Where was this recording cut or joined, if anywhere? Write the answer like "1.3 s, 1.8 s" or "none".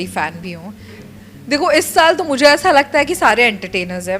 1.0 s